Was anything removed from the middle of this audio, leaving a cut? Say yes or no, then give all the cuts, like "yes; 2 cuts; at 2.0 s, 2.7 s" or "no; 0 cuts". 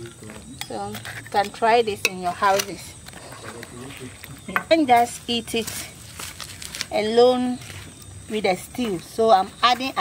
yes; 1 cut; at 4.7 s